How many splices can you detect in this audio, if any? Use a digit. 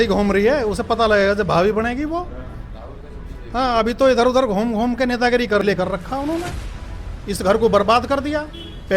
1